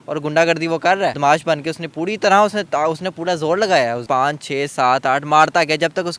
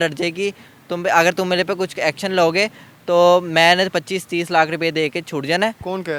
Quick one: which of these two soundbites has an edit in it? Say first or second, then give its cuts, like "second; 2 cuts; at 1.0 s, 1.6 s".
first; 2 cuts; at 1.2 s, 4.0 s